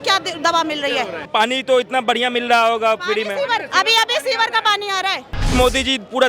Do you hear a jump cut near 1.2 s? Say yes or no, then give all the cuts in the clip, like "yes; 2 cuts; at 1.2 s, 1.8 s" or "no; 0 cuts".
yes; 2 cuts; at 1.2 s, 5.5 s